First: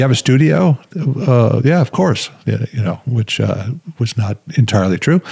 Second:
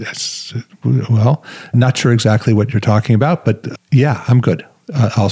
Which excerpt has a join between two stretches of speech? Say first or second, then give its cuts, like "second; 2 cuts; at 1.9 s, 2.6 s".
second; 2 cuts; at 1.7 s, 3.7 s